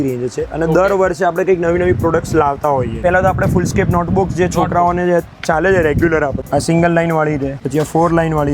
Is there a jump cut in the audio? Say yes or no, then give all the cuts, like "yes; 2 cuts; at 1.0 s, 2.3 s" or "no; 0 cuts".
yes; 3 cuts; at 3.0 s, 6.4 s, 7.6 s